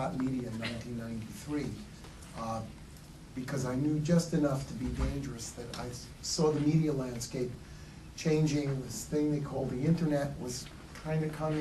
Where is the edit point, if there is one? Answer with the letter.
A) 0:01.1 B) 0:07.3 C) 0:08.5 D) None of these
A